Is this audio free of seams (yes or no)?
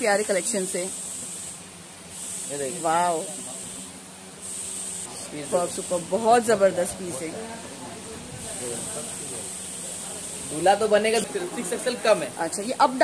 no